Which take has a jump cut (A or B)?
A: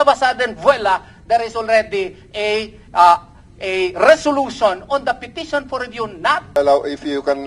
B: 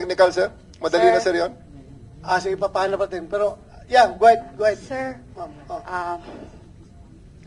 A